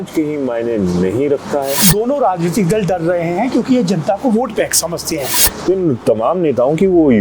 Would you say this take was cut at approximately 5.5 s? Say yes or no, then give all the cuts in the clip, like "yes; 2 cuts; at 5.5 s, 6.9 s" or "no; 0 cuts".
yes; 2 cuts; at 1.8 s, 5.5 s